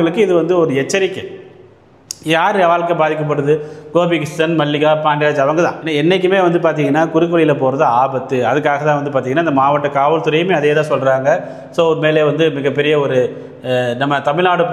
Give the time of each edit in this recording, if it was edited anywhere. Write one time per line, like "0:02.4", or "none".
0:05.8